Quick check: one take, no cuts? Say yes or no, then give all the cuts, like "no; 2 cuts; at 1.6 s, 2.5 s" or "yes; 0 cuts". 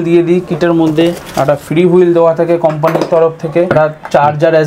no; 2 cuts; at 1.2 s, 3.7 s